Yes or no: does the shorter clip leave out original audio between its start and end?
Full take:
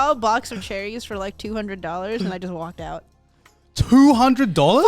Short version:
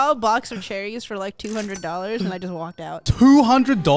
yes